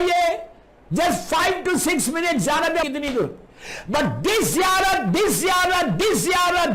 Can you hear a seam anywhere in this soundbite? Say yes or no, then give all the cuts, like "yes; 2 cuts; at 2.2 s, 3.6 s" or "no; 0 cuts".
yes; 1 cut; at 2.8 s